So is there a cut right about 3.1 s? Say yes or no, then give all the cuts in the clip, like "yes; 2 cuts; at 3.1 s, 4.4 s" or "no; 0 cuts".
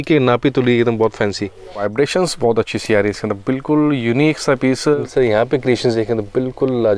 no; 2 cuts; at 1.8 s, 5.0 s